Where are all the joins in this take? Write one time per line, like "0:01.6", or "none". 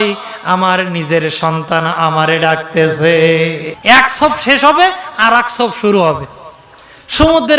0:03.7